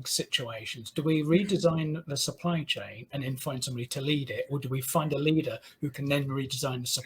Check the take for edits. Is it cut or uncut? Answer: uncut